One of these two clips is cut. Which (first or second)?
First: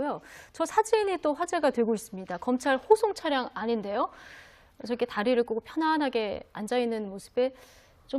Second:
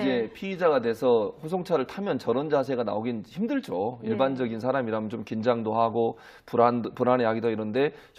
first